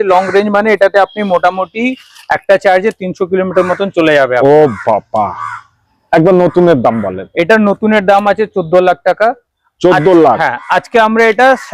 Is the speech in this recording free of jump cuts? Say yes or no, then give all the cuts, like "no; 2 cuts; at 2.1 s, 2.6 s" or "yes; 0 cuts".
yes; 0 cuts